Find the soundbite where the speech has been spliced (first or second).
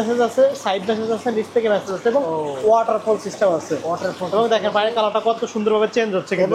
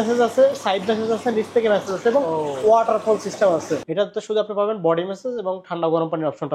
second